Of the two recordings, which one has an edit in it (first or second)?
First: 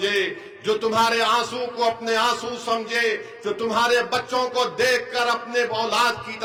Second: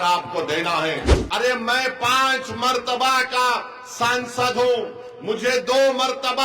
second